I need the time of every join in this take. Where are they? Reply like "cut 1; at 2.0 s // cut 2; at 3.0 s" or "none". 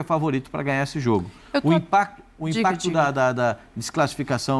none